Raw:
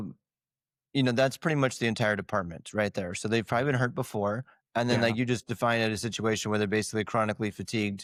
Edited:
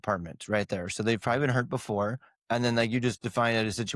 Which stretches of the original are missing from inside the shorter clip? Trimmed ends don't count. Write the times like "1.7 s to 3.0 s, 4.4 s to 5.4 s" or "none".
none

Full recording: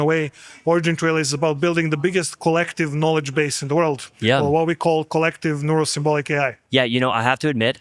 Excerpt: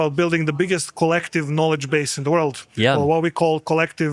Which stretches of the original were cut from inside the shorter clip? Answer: none

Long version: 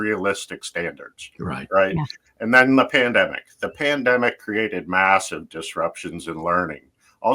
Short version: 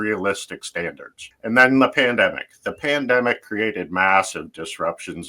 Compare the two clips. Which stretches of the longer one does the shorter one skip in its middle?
1.2 s to 2.2 s

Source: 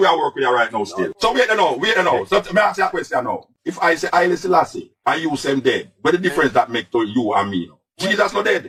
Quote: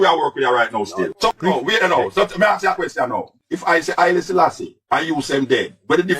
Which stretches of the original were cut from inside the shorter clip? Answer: 1.3 s to 1.5 s

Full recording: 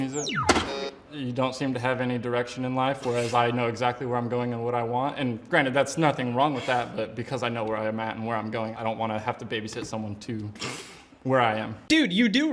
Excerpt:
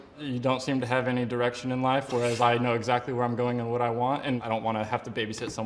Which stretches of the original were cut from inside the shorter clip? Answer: 5.4 s to 8.8 s

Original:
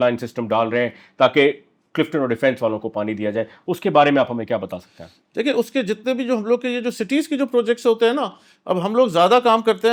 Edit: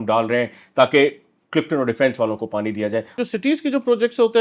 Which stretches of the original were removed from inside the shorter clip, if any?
3.6 s to 6.8 s

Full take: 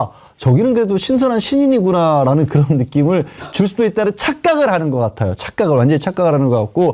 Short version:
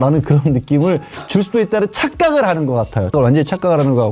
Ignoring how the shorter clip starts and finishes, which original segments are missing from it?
5.4 s to 5.7 s

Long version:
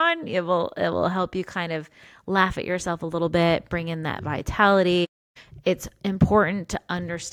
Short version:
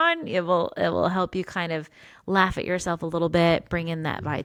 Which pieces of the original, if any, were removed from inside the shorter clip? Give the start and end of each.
none

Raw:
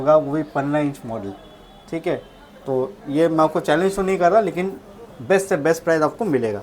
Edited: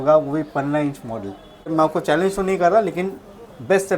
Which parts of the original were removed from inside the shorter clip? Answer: 1.7 s to 3.3 s

